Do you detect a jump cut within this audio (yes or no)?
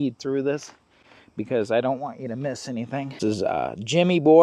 yes